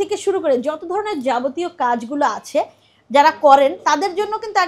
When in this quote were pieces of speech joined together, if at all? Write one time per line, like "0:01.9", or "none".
none